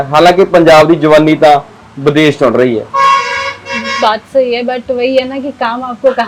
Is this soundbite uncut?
yes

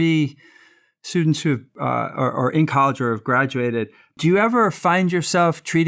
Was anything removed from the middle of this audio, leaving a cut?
yes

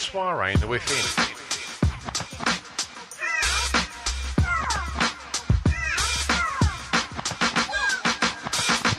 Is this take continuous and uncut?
yes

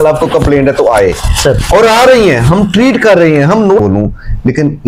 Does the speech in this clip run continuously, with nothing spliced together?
no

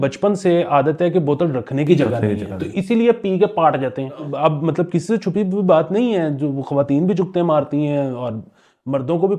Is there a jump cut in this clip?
yes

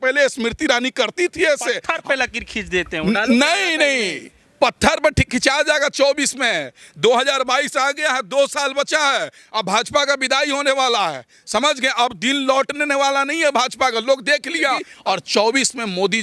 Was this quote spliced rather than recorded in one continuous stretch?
yes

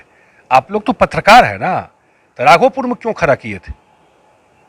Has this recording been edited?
no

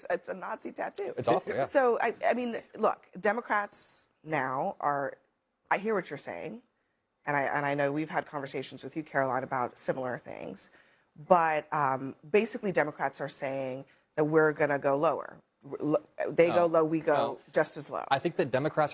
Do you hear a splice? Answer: no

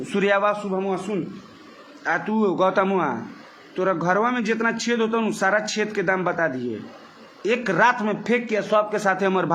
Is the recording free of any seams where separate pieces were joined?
yes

